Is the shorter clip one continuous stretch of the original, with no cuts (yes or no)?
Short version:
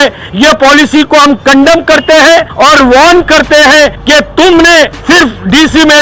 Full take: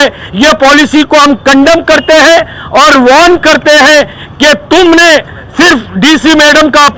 no